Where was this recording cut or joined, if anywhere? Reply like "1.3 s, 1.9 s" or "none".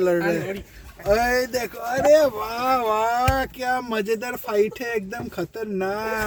none